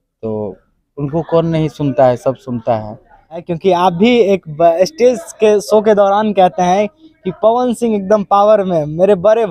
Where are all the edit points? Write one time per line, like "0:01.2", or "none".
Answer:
0:03.5